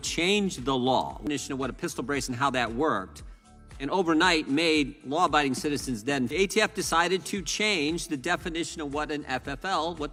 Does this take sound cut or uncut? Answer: uncut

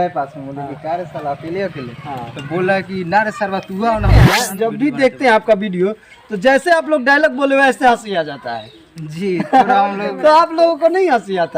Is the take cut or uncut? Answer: cut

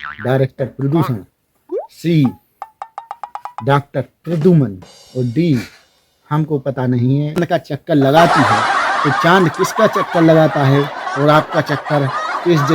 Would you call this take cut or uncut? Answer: cut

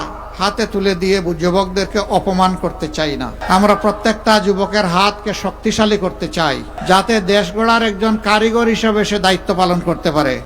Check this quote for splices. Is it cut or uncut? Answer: cut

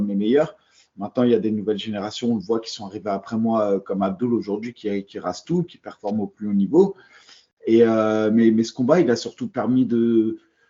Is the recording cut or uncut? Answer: uncut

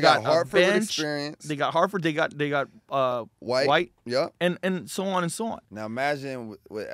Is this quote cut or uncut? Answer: cut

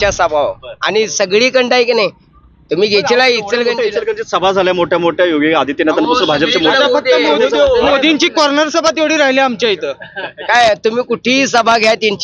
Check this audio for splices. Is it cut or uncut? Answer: uncut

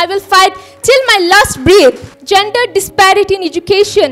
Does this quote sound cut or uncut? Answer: cut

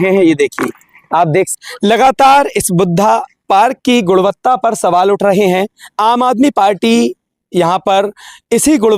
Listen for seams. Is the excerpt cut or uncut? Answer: cut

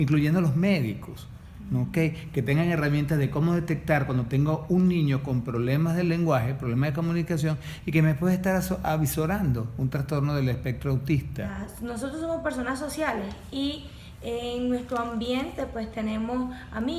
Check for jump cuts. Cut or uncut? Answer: cut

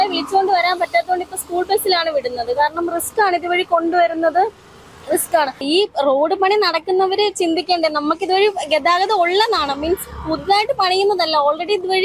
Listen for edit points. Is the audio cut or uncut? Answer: cut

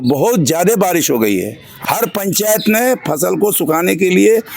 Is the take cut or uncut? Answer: cut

